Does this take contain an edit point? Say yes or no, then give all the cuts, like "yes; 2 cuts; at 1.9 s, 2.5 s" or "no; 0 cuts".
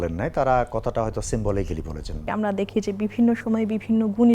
yes; 1 cut; at 2.2 s